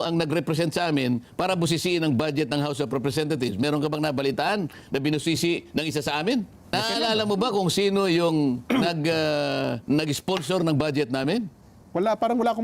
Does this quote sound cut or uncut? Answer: cut